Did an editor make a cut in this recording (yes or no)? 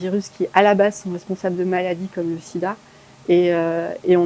no